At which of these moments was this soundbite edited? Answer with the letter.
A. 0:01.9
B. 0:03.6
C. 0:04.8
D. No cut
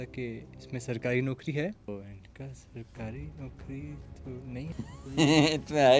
A